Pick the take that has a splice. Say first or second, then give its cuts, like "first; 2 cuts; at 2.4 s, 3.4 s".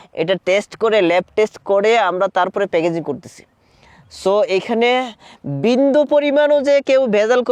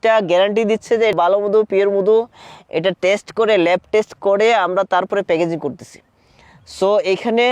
second; 1 cut; at 1.1 s